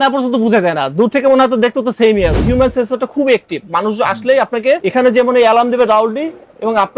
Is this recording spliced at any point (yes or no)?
yes